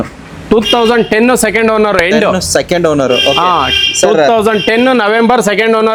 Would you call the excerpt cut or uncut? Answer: uncut